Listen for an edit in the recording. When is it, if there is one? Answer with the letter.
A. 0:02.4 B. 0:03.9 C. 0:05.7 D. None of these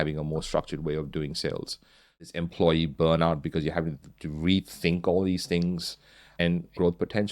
A